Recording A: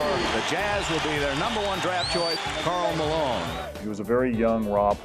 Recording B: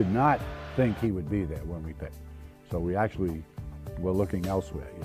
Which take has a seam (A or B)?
B